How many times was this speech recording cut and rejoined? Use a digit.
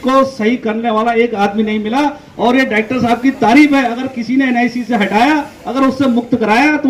0